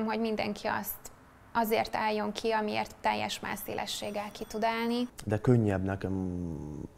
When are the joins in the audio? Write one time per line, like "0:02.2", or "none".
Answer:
0:05.1